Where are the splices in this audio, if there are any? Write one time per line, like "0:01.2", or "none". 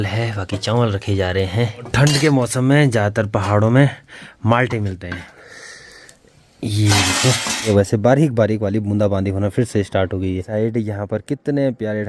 0:01.9
0:05.3
0:07.7
0:10.5